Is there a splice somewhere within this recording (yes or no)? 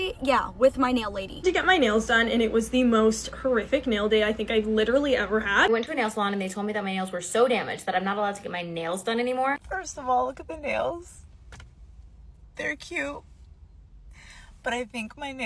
yes